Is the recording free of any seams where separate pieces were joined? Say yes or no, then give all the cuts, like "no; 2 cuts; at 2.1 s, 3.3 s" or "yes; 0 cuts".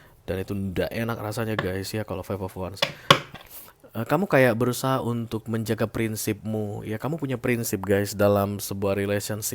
no; 1 cut; at 3.3 s